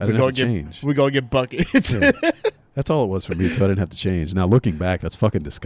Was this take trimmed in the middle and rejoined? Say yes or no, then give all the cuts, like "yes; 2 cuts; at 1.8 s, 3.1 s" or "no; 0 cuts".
no; 0 cuts